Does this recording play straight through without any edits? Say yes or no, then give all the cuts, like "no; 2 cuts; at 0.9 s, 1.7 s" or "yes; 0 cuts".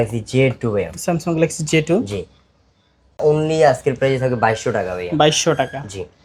no; 1 cut; at 3.2 s